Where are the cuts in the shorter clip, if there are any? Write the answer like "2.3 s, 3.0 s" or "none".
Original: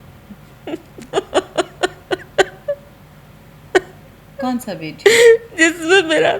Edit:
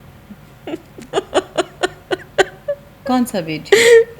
2.9 s